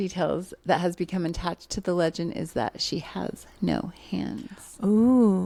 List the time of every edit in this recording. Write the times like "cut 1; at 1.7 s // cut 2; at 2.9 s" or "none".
none